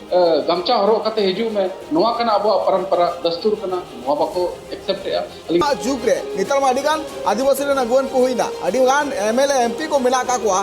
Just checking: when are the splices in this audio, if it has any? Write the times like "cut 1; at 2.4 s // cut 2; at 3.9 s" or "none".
cut 1; at 5.6 s